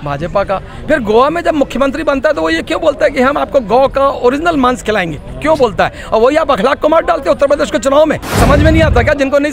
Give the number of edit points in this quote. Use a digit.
1